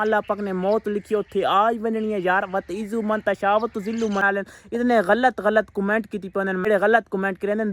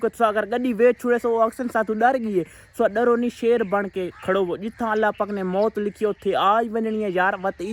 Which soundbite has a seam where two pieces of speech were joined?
first; 2 cuts; at 4.2 s, 6.6 s

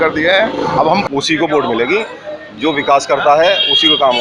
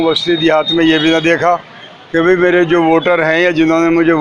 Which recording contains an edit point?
first; 1 cut; at 1.0 s

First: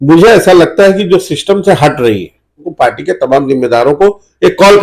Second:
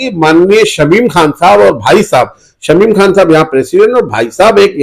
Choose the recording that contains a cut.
first; 1 cut; at 2.7 s

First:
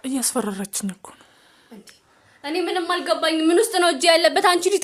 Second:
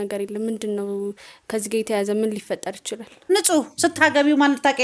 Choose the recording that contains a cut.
second; 1 cut; at 3.3 s

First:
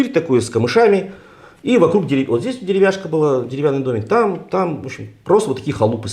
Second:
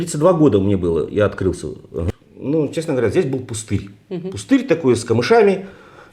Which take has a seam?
second; 1 cut; at 2.1 s

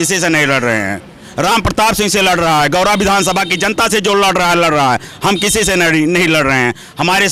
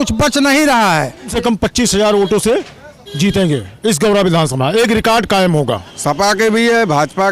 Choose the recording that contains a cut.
second; 2 cuts; at 1.3 s, 5.9 s

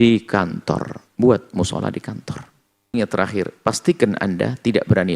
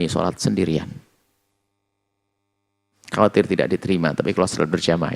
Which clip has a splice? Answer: first; 1 cut; at 2.9 s

